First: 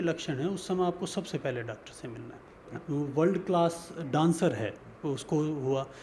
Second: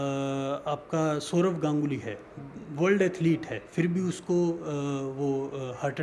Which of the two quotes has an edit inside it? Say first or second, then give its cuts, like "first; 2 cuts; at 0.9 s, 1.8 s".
first; 2 cuts; at 2.8 s, 4.2 s